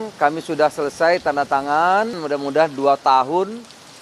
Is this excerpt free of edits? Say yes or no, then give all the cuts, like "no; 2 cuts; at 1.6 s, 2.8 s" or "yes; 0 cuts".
no; 1 cut; at 2.2 s